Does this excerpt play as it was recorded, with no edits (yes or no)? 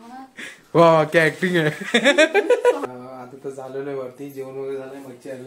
no